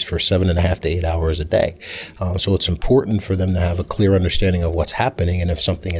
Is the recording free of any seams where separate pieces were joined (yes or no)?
yes